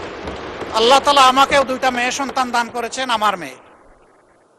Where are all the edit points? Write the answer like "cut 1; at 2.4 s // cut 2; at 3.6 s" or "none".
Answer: none